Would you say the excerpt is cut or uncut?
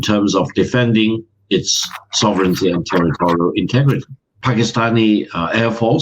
cut